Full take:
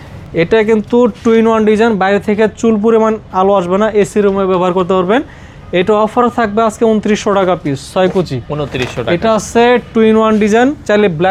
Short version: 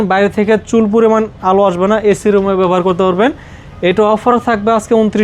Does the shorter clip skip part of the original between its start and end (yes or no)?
no